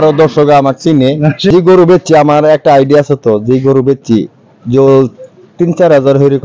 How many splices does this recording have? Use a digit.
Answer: 1